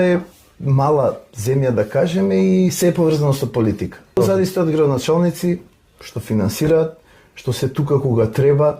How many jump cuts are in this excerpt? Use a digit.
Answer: 1